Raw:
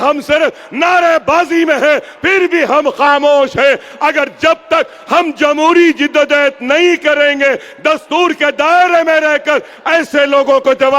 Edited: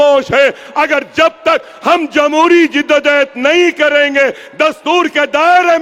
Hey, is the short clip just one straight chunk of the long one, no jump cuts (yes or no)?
yes